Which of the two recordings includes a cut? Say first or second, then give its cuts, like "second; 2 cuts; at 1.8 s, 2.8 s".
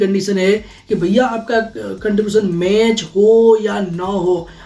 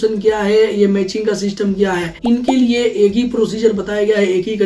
second; 1 cut; at 2.1 s